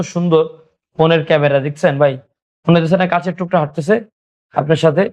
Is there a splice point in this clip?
no; 0 cuts

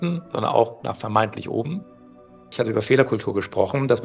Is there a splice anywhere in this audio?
yes; 1 cut; at 2.4 s

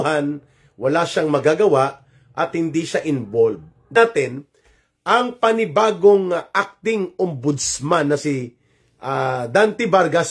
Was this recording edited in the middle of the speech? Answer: yes; 1 cut; at 3.9 s

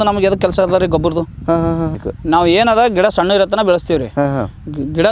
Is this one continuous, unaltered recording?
no; 1 cut; at 2.0 s

